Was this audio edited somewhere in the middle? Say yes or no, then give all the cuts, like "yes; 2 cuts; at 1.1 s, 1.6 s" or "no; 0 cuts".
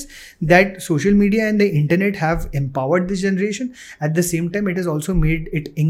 no; 0 cuts